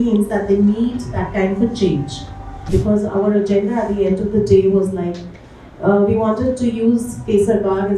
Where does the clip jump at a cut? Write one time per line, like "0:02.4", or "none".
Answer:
0:02.6